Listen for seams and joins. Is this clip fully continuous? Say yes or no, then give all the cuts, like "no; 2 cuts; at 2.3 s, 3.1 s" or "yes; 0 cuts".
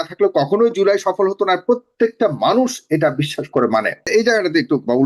no; 1 cut; at 4.1 s